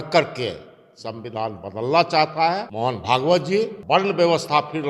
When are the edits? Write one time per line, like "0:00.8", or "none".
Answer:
0:02.7
0:03.8